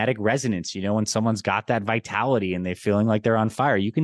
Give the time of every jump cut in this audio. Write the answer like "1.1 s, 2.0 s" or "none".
none